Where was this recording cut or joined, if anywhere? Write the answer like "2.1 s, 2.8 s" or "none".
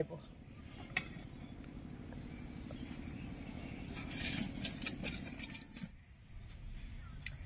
none